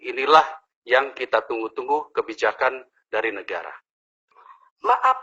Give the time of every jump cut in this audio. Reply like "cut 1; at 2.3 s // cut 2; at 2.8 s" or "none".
cut 1; at 4.2 s